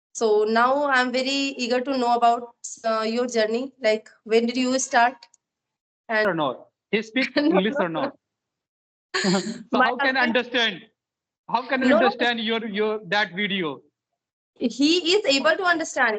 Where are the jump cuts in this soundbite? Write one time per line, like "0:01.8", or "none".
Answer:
0:06.2

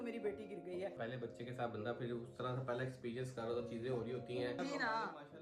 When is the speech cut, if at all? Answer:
0:01.0
0:04.6

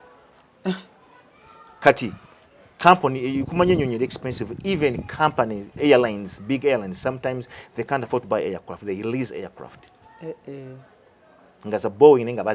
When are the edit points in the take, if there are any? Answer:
none

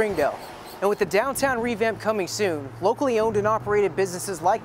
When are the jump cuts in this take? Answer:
none

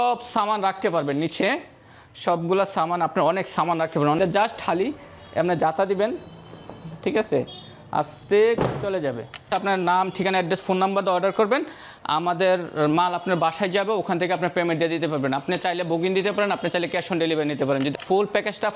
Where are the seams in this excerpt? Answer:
0:04.2
0:09.5
0:17.9

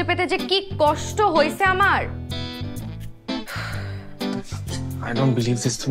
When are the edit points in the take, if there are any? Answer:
0:02.0
0:05.0

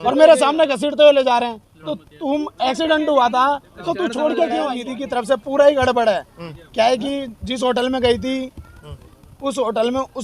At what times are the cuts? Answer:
0:04.9

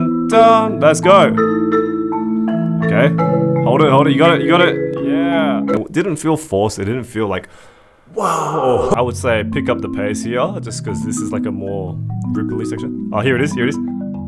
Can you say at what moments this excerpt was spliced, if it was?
0:05.8
0:08.9

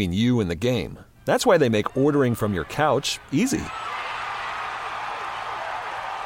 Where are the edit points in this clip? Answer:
none

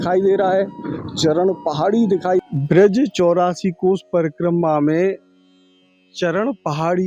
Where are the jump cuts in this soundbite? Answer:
0:02.4

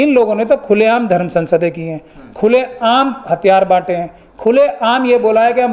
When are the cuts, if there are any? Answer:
none

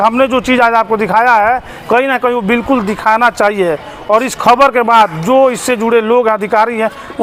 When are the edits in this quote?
none

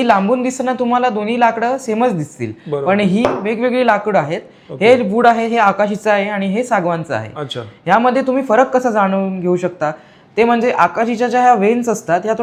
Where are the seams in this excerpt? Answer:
none

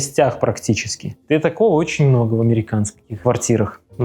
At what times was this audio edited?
none

